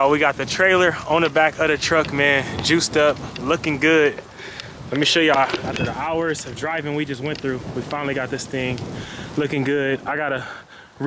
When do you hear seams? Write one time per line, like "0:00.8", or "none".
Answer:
none